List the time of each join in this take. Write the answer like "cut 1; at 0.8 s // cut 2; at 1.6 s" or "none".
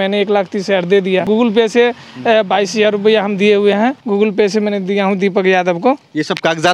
cut 1; at 1.3 s // cut 2; at 4.0 s